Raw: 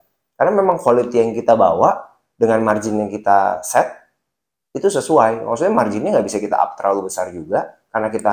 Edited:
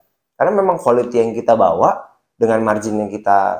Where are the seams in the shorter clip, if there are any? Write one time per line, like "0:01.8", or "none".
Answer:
none